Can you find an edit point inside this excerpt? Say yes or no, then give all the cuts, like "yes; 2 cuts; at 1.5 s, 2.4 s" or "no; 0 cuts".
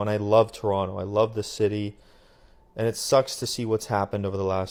no; 0 cuts